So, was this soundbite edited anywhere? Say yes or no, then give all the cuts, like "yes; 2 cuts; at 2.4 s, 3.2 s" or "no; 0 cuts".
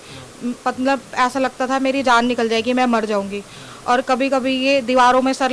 no; 0 cuts